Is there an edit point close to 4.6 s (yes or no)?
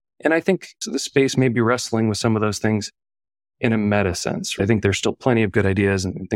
yes